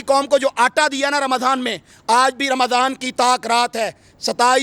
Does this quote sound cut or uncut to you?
uncut